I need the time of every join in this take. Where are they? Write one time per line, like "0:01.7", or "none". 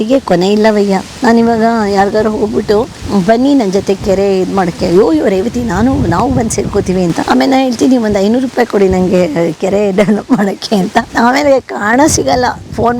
0:01.1
0:03.0
0:07.2
0:11.1